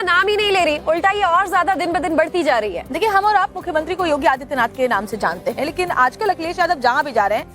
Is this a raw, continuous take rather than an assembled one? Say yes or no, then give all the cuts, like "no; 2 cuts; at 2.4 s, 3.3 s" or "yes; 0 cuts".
no; 1 cut; at 5.7 s